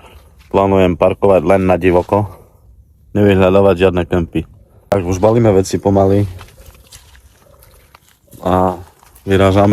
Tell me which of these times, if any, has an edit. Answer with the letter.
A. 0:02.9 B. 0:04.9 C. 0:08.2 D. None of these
B